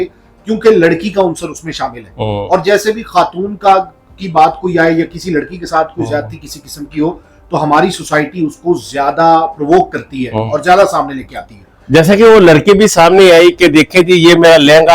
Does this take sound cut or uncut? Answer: uncut